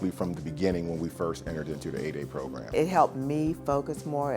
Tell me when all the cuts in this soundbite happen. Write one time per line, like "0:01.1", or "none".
0:02.7